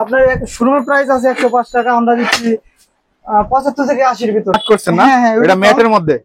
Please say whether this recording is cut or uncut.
cut